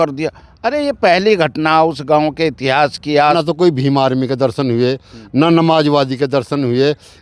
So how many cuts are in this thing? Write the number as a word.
one